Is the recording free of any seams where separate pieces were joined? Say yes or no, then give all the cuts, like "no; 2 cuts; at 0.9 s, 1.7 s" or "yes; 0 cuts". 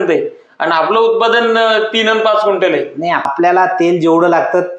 no; 1 cut; at 3.3 s